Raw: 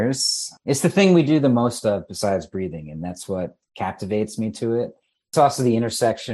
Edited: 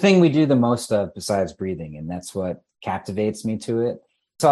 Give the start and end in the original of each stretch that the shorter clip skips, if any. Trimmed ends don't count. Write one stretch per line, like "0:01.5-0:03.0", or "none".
none